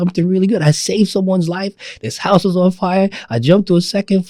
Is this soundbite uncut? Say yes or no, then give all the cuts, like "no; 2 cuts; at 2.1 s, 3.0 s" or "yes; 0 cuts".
yes; 0 cuts